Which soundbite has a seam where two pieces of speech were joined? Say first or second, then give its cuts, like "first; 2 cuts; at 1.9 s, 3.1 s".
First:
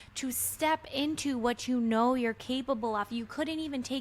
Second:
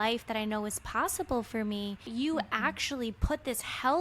second; 1 cut; at 2.1 s